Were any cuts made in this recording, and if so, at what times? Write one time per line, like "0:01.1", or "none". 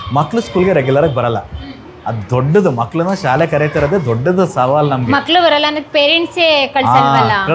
none